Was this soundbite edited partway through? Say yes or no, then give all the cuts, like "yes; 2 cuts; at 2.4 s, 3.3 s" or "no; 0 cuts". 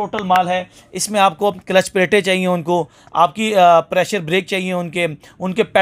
no; 0 cuts